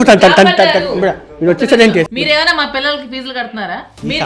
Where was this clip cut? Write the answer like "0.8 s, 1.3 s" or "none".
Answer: 2.1 s